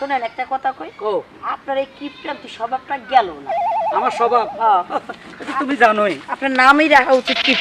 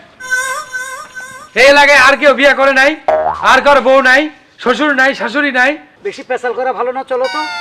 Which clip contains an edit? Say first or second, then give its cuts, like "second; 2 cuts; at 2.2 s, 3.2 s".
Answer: second; 1 cut; at 5.8 s